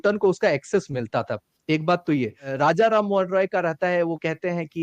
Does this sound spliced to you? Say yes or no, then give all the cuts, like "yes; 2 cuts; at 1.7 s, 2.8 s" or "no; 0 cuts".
yes; 1 cut; at 2.4 s